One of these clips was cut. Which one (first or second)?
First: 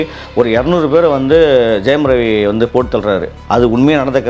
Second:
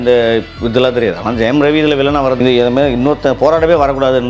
second